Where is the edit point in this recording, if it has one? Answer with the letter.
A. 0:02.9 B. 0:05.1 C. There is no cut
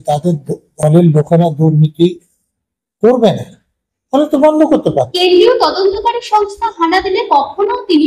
B